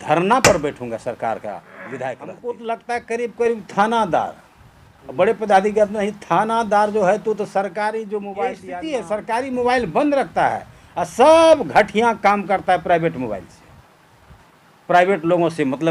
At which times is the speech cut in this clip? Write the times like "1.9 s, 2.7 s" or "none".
2.3 s, 8.6 s